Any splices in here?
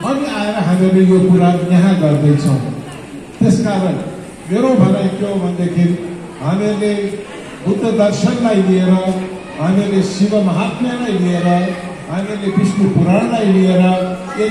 no; 0 cuts

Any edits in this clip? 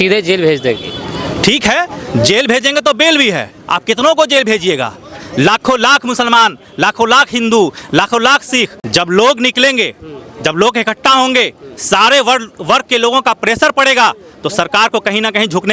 yes; 1 cut; at 8.8 s

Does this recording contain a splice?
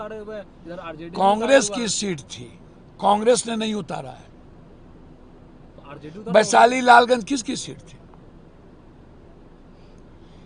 no; 0 cuts

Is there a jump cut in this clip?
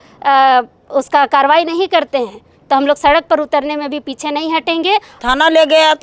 yes; 1 cut; at 5.1 s

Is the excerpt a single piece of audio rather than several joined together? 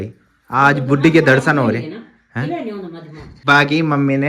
yes; 0 cuts

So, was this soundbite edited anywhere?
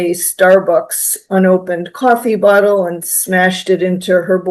no; 0 cuts

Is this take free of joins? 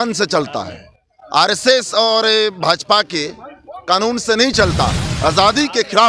no; 1 cut; at 5.0 s

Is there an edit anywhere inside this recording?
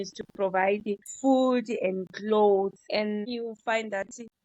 yes; 2 cuts; at 1.1 s, 3.3 s

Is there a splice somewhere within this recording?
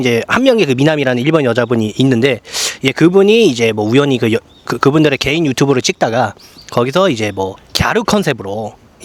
no; 0 cuts

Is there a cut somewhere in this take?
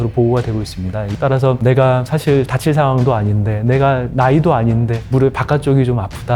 yes; 1 cut; at 1.1 s

